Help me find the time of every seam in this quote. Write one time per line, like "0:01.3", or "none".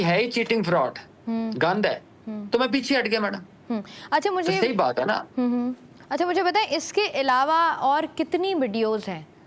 none